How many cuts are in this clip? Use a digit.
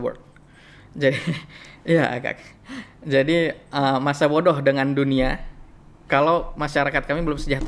0